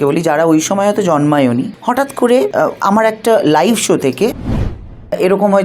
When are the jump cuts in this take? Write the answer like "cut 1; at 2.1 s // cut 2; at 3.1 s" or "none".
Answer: cut 1; at 1.7 s // cut 2; at 2.5 s // cut 3; at 4.7 s

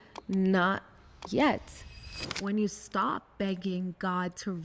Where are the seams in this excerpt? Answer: cut 1; at 2.0 s

